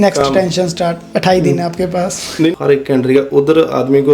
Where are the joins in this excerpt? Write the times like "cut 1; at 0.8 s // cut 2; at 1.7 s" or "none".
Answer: cut 1; at 2.5 s